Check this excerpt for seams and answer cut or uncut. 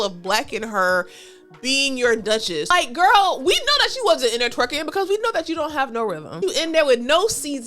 cut